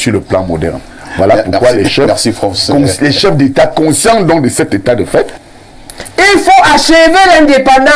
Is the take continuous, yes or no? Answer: no